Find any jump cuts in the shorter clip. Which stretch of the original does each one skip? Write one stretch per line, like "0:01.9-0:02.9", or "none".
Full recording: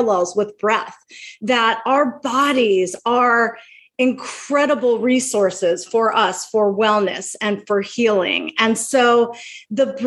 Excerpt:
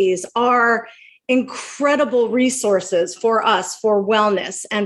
none